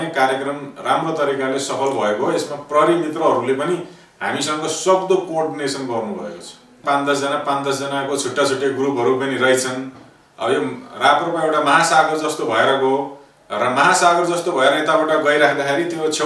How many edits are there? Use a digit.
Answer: 1